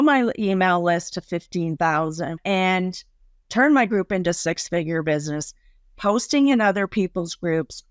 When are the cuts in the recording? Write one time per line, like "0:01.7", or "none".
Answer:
0:02.4